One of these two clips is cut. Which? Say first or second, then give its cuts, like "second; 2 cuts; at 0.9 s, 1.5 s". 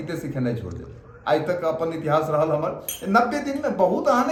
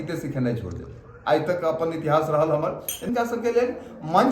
second; 1 cut; at 3.0 s